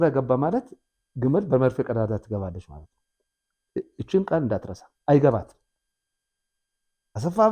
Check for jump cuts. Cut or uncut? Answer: uncut